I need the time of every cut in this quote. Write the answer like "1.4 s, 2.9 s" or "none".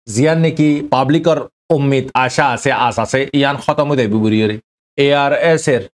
4.9 s